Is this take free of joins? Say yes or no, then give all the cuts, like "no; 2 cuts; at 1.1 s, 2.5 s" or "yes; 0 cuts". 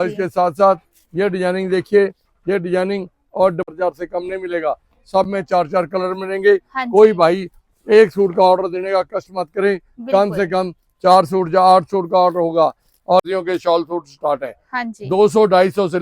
no; 2 cuts; at 3.7 s, 13.2 s